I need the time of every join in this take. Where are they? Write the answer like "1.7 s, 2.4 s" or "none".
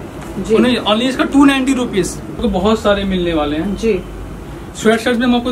2.4 s